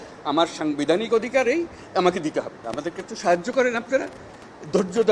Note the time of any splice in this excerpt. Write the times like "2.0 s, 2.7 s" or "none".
2.6 s